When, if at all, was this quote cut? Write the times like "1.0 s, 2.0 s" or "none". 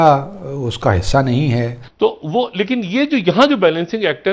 1.8 s